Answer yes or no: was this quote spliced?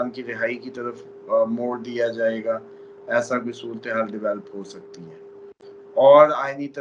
no